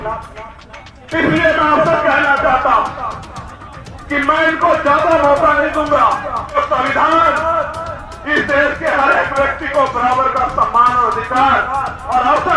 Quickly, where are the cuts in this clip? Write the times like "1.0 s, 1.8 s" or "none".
6.6 s